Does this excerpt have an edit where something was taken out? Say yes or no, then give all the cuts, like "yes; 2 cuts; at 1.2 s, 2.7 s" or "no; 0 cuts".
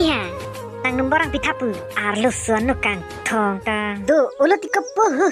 yes; 1 cut; at 3.9 s